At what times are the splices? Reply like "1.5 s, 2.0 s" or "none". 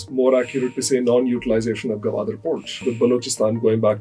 2.8 s